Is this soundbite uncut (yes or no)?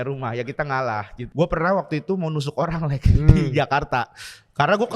no